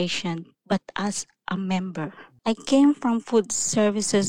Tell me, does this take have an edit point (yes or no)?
yes